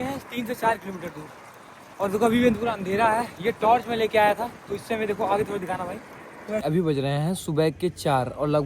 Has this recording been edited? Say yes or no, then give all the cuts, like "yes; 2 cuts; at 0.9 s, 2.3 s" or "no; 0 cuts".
yes; 1 cut; at 6.6 s